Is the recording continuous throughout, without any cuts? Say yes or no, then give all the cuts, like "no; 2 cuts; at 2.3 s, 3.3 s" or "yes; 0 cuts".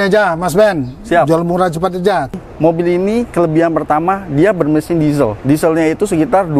no; 1 cut; at 2.3 s